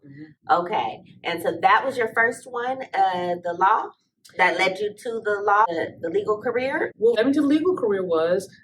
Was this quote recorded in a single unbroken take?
no; 2 cuts; at 5.7 s, 7.1 s

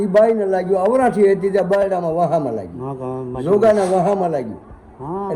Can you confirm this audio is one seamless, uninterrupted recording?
yes; 0 cuts

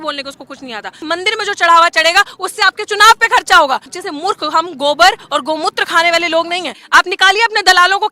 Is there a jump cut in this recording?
yes; 3 cuts; at 1.0 s, 3.9 s, 6.8 s

